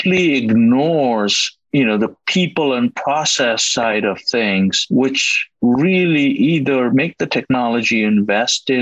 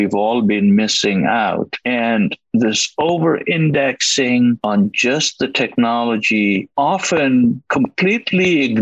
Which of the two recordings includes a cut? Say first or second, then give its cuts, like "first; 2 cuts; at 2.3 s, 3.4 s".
second; 1 cut; at 4.6 s